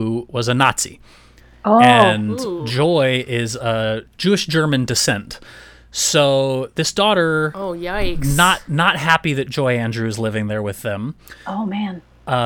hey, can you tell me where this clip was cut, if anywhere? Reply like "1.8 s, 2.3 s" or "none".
none